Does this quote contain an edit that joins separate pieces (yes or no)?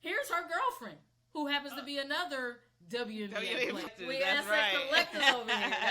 yes